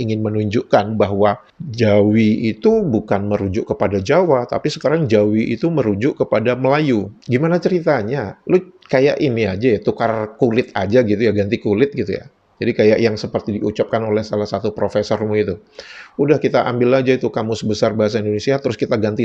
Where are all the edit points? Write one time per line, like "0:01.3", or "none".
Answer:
none